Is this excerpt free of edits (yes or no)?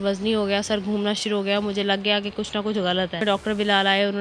no